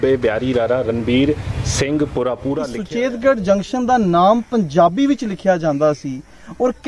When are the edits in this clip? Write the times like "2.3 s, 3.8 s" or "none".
2.7 s